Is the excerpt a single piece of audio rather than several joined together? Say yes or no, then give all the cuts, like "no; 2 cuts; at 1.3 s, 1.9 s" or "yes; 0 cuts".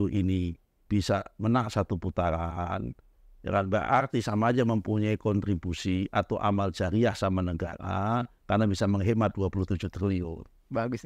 yes; 0 cuts